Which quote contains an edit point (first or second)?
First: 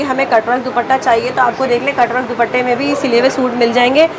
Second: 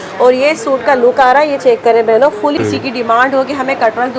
second